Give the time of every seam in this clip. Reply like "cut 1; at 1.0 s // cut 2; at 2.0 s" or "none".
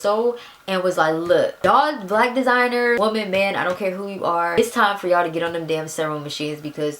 cut 1; at 1.6 s // cut 2; at 3.0 s // cut 3; at 4.6 s